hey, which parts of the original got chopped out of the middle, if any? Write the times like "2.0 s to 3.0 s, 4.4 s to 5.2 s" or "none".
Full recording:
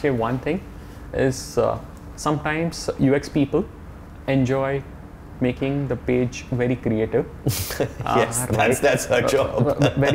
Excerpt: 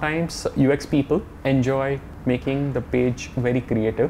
3.7 s to 4.1 s, 4.9 s to 5.2 s